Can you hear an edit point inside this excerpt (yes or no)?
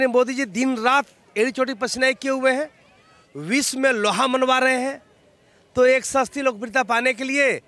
no